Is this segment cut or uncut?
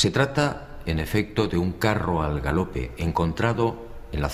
uncut